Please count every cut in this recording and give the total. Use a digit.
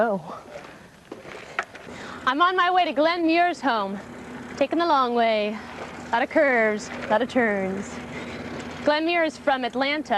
1